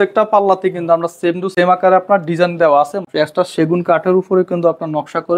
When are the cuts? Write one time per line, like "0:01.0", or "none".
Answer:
0:01.5
0:03.1